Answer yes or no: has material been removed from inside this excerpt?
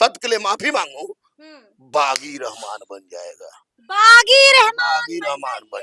no